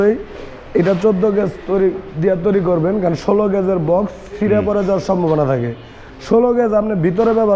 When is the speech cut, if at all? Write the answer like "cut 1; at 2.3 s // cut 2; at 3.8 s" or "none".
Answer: none